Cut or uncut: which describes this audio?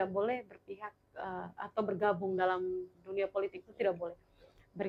uncut